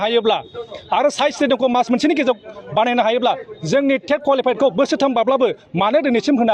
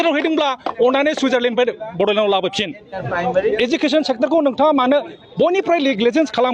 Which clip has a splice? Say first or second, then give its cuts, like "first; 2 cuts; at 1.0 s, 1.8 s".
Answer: second; 1 cut; at 2.9 s